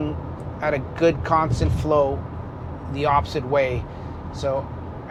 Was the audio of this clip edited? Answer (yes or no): no